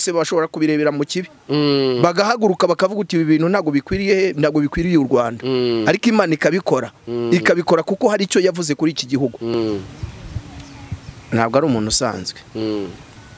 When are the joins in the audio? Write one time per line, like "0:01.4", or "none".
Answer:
0:09.5